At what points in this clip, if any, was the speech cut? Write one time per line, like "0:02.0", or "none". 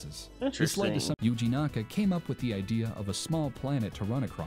0:01.2